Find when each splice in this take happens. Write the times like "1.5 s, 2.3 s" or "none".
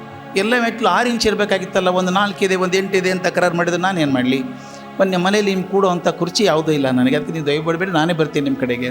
none

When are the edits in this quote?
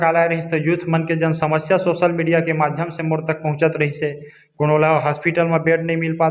none

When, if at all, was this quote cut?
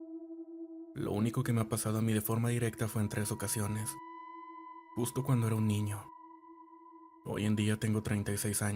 6.0 s, 7.2 s

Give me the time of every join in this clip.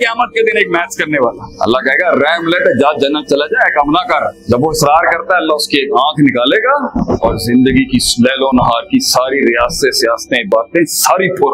1.5 s, 4.4 s, 7.0 s

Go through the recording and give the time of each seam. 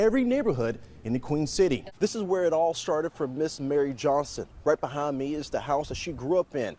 1.9 s

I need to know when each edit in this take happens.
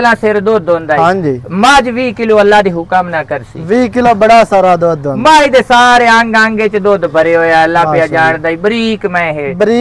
none

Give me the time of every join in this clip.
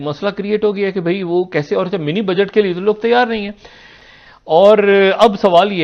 none

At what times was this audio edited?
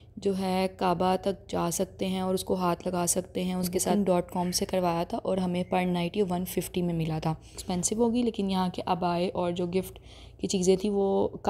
3.9 s, 7.6 s

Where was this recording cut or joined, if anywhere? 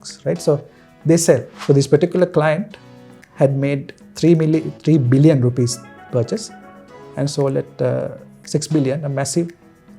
1.5 s

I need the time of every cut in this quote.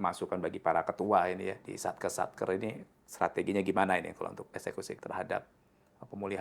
1.7 s, 4.4 s

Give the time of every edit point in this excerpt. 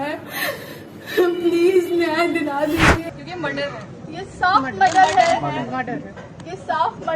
3.1 s

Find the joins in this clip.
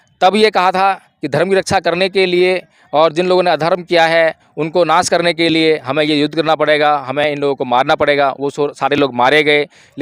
none

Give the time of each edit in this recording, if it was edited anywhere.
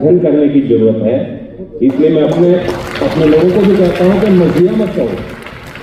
none

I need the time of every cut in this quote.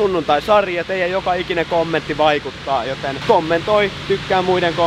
3.2 s

